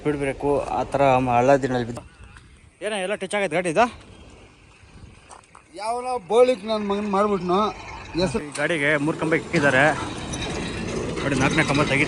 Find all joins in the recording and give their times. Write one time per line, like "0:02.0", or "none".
0:01.9
0:08.4